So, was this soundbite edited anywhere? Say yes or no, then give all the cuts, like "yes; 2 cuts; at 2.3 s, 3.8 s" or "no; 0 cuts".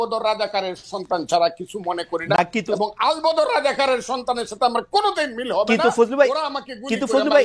no; 0 cuts